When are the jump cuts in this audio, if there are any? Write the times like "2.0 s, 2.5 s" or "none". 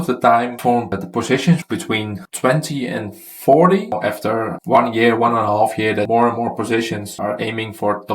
0.9 s, 3.9 s, 6.1 s